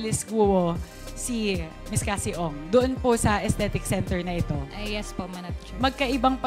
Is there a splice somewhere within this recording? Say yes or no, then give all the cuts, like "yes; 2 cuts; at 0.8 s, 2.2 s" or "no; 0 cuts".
no; 0 cuts